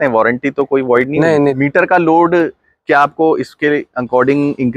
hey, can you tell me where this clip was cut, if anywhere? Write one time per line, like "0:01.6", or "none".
0:01.6